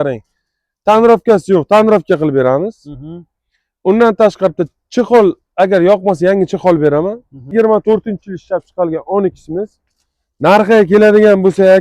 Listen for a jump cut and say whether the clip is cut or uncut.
cut